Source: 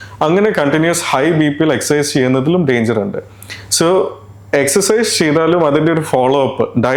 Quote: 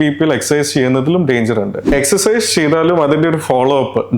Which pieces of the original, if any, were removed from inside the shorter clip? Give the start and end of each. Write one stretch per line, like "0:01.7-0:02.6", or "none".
0:03.2-0:04.5

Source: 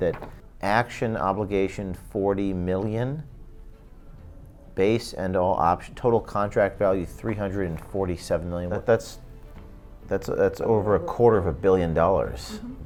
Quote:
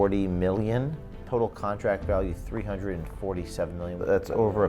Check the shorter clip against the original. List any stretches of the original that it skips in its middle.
0:03.4-0:05.9
0:08.7-0:10.3

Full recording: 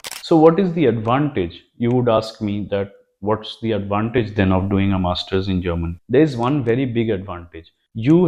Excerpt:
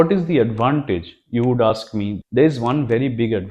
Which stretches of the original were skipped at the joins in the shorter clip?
0:02.6-0:05.9

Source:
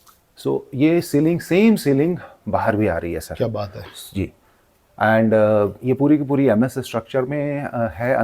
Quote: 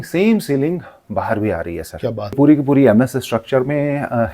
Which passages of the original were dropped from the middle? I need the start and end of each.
0:03.7-0:06.0

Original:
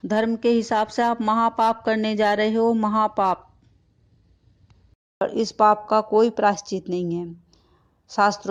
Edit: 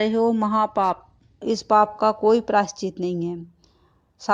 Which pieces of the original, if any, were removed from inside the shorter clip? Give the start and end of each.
0:03.8-0:05.3

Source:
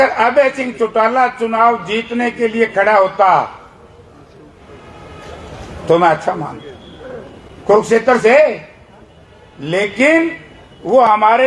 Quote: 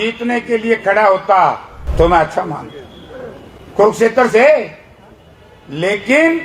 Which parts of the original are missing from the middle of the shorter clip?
0:03.7-0:05.7

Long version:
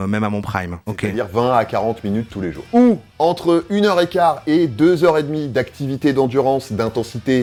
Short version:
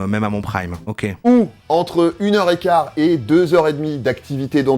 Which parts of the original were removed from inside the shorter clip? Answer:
0:01.1-0:02.6

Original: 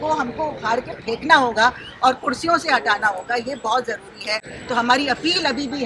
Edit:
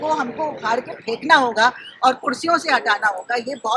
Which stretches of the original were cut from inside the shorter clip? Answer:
none

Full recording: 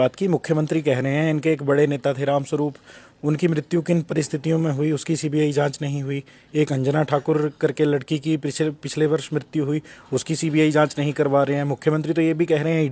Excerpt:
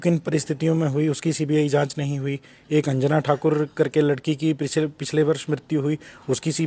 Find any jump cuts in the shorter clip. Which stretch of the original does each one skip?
none

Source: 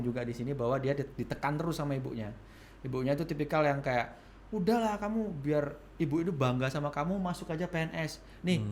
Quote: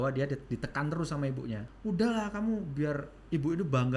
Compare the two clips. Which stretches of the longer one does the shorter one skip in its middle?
0:02.3-0:04.3

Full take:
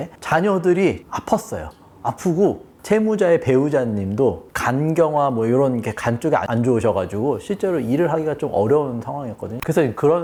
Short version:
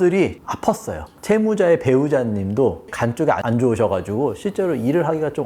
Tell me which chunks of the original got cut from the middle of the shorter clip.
0:01.7-0:02.7
0:04.5-0:05.9

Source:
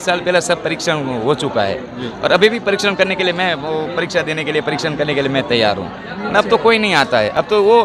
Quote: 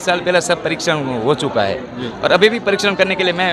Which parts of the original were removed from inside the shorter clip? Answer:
none

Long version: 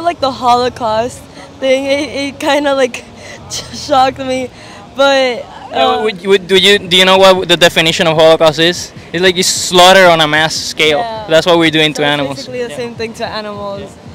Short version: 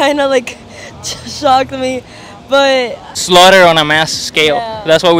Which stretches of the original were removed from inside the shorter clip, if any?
0:05.6-0:09.5

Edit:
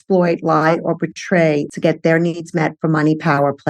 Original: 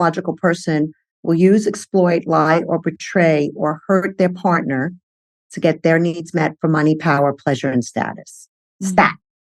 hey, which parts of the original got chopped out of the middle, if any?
0:03.5-0:05.5

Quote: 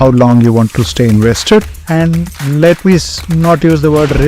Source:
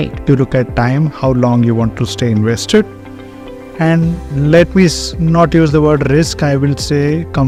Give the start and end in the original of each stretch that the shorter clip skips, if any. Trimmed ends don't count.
0:03.0-0:03.7

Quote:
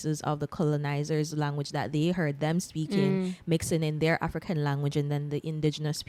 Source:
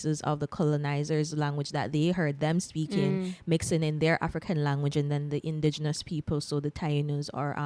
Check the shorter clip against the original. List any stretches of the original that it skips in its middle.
none

